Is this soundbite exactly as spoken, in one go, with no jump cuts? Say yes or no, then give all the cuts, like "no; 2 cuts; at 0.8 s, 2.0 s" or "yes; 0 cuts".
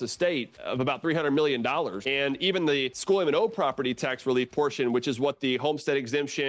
no; 2 cuts; at 2.0 s, 2.9 s